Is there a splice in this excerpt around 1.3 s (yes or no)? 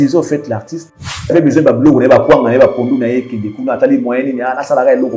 yes